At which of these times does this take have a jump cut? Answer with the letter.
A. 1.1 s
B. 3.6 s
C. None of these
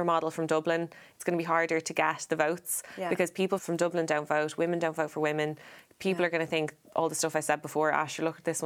B